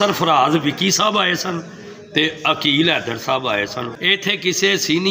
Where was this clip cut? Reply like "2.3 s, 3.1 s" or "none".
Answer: 3.9 s